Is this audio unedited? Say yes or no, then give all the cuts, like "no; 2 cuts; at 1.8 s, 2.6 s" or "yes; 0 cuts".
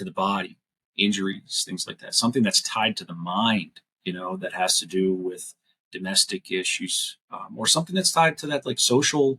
yes; 0 cuts